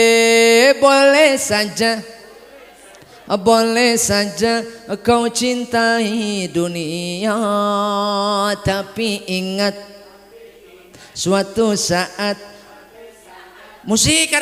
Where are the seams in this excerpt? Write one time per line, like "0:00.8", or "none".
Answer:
none